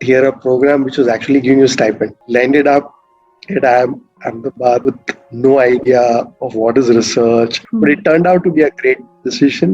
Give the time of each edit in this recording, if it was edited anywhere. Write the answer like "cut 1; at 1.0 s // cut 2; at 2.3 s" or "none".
cut 1; at 2.2 s // cut 2; at 4.8 s // cut 3; at 7.6 s